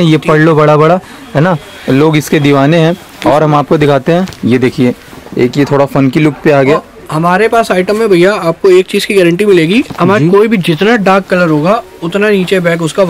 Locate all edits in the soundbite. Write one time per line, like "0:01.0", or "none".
none